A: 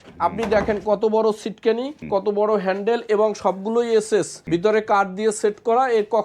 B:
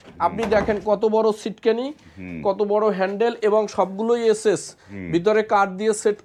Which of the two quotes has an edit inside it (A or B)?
A